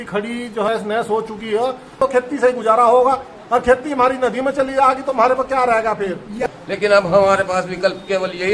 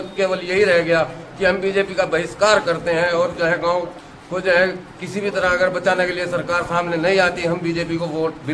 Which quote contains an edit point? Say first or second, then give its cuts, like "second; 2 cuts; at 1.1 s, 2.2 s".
first; 3 cuts; at 0.7 s, 2.0 s, 6.4 s